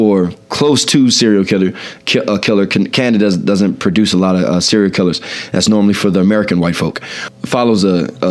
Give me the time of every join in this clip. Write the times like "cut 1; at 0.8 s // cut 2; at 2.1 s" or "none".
cut 1; at 7.2 s